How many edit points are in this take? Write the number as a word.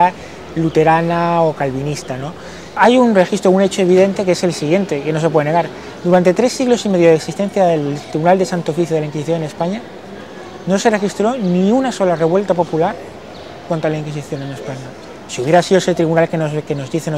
one